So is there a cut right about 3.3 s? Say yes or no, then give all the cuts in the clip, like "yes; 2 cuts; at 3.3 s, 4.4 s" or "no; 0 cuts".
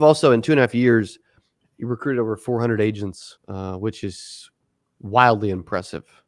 yes; 1 cut; at 3.3 s